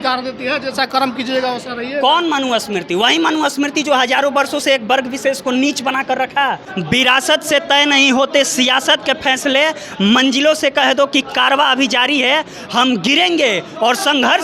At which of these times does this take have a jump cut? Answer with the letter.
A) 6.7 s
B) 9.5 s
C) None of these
A